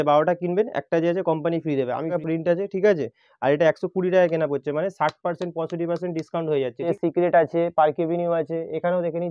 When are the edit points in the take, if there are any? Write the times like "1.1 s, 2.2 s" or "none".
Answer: 2.1 s, 6.8 s